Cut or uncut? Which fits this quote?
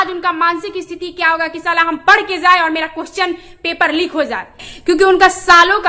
cut